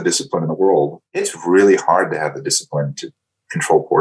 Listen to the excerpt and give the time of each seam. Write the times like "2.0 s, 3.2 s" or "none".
1.3 s